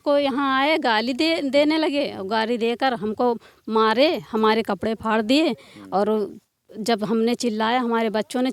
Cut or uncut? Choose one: uncut